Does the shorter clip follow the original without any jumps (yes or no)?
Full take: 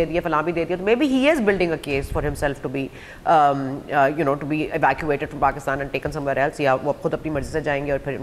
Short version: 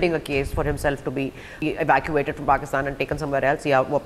no